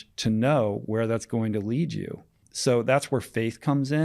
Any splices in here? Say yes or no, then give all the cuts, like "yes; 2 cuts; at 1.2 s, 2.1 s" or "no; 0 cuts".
yes; 1 cut; at 2.5 s